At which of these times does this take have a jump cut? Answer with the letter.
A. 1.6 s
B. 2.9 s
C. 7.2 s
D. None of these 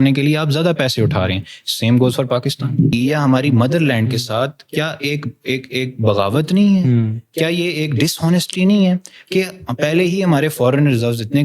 B